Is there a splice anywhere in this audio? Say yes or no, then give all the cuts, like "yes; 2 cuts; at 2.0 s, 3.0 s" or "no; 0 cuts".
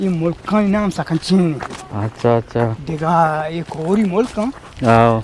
no; 0 cuts